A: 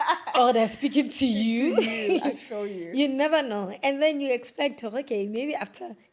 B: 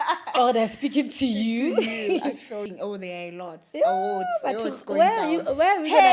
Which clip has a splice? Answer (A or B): B